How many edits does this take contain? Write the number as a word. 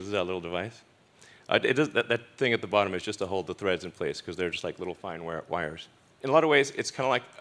zero